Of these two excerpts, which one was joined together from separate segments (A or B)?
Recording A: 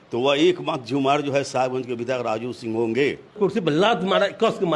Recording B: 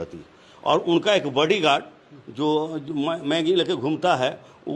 A